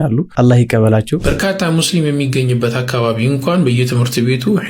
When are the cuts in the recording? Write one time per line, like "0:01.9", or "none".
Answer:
0:01.1